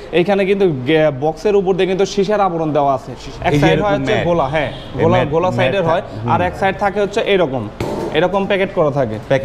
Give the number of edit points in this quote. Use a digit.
1